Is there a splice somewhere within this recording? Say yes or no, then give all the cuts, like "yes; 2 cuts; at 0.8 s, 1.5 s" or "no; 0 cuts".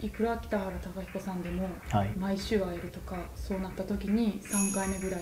yes; 1 cut; at 3.3 s